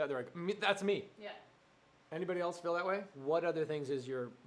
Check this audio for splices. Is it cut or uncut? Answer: cut